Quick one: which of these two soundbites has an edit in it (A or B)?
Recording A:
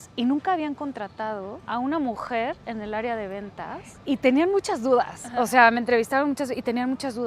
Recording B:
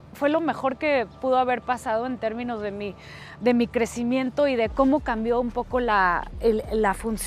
A